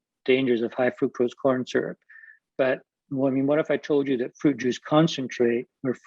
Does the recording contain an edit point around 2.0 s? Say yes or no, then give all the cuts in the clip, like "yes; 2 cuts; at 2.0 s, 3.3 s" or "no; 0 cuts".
no; 0 cuts